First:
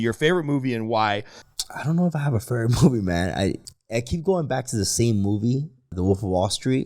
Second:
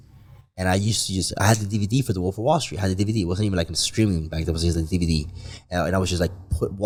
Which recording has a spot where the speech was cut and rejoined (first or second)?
first